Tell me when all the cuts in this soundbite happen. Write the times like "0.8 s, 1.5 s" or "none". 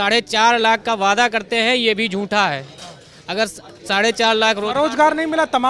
none